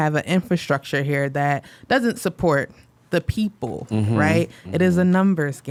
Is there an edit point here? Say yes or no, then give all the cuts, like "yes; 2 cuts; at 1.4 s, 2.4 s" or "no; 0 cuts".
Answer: no; 0 cuts